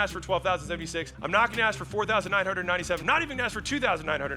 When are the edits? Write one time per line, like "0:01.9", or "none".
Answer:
0:01.2
0:03.0